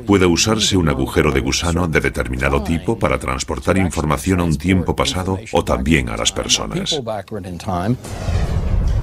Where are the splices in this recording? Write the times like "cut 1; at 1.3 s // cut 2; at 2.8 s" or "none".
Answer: cut 1; at 2.7 s